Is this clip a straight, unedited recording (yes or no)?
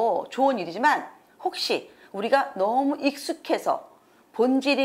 yes